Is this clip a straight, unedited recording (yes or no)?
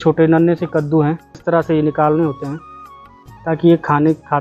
no